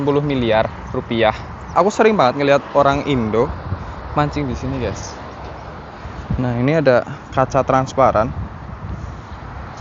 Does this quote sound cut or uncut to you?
cut